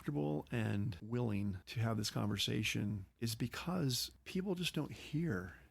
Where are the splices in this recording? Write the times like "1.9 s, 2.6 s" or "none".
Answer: 1.0 s, 1.7 s, 3.1 s, 4.1 s

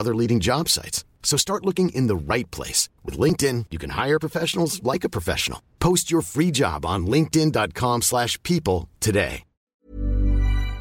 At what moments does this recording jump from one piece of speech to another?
9.9 s

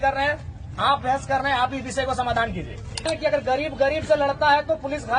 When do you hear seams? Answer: 3.1 s

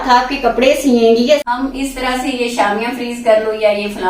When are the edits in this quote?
1.4 s

